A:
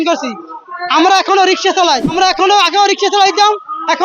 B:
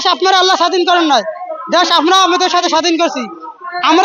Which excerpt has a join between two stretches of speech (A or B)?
A